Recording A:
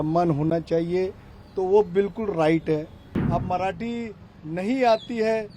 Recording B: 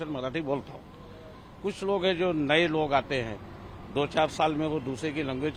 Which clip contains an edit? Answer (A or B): A